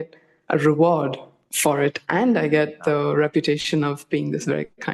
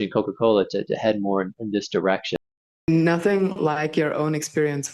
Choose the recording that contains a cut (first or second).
second